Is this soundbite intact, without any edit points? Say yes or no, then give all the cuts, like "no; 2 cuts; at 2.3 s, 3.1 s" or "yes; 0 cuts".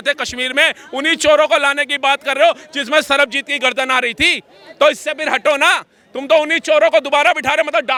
yes; 0 cuts